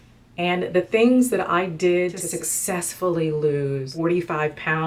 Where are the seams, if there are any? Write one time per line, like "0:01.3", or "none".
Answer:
0:02.2
0:03.9